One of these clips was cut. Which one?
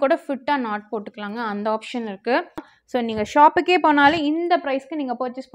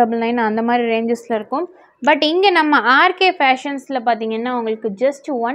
first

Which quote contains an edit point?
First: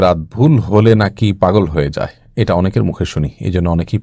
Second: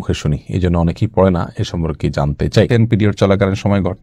second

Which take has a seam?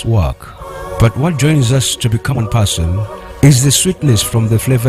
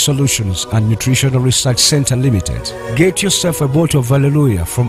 first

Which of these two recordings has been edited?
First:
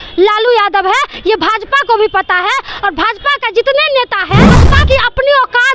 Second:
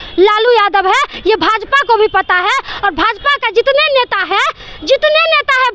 first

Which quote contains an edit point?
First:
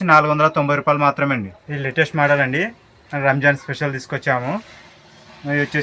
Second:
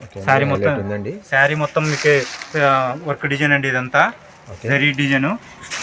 first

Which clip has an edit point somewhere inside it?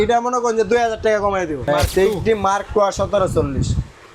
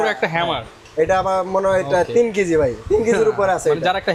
first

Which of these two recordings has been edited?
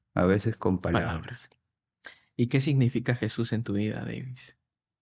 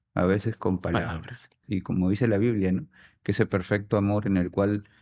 second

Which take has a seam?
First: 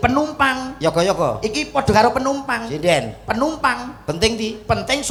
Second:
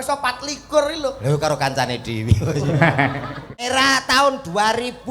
second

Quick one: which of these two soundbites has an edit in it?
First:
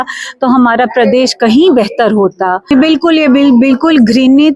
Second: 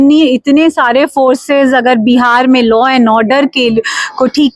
first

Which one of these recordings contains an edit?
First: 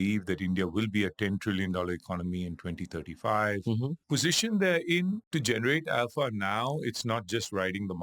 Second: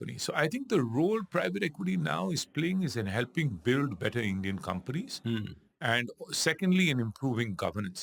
first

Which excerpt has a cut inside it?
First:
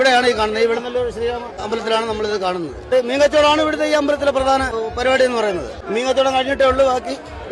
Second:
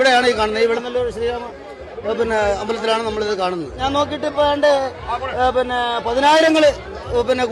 first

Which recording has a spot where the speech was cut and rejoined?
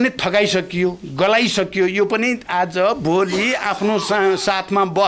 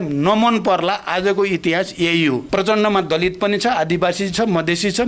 second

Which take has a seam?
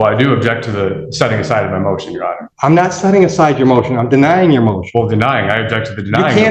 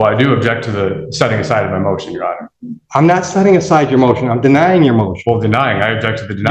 first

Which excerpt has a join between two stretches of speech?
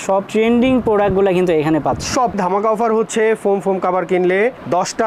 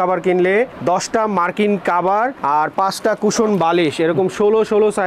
first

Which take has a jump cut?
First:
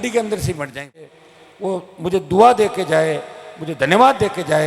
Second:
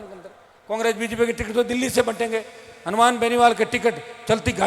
first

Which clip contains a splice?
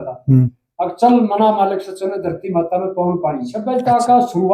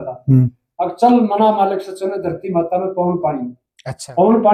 first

